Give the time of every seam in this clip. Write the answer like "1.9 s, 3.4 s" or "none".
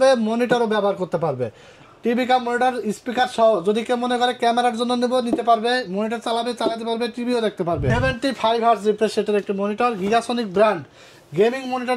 7.9 s